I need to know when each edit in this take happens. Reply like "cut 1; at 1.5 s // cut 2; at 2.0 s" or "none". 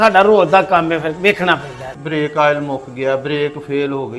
cut 1; at 2.0 s